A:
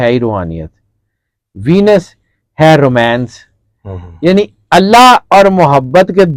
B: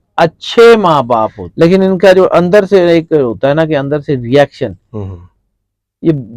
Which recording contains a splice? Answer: B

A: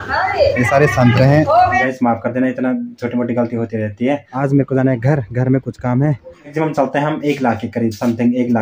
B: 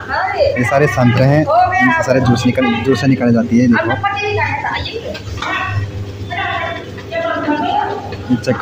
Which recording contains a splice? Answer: A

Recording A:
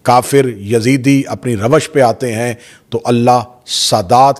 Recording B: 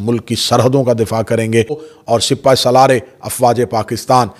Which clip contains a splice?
B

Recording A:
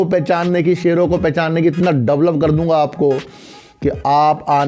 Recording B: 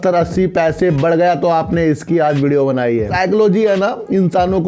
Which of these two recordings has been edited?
B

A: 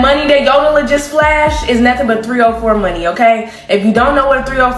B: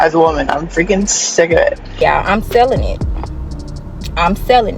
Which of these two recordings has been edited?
B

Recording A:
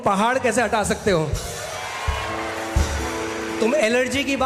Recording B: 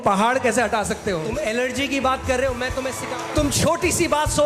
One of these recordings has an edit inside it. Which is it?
B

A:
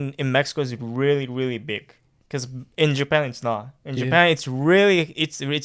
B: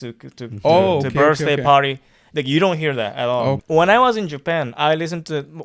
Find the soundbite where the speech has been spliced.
B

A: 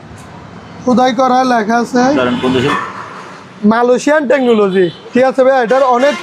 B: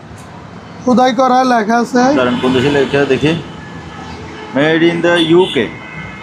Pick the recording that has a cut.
A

